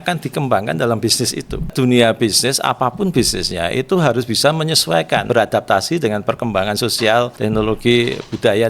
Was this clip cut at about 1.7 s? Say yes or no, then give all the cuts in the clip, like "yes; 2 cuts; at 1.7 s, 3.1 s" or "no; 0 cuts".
yes; 3 cuts; at 1.7 s, 5.2 s, 7.3 s